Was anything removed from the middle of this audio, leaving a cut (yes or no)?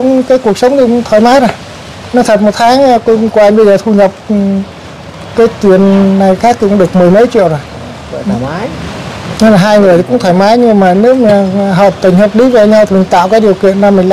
no